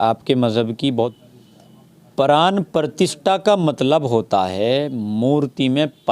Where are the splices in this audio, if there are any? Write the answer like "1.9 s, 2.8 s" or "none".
1.1 s